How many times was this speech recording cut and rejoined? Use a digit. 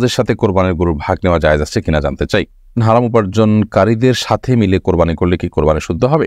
1